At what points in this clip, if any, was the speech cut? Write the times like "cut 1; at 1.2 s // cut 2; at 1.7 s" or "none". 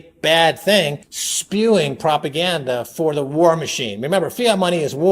cut 1; at 1.0 s